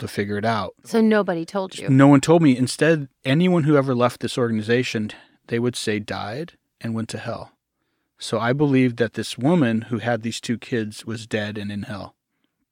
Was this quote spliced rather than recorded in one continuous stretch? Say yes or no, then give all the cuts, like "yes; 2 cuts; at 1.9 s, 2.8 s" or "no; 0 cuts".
yes; 1 cut; at 0.9 s